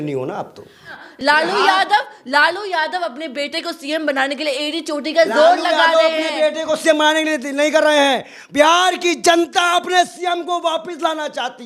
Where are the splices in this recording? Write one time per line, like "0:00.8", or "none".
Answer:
0:01.0